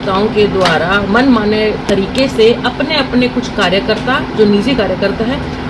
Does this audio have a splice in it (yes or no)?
no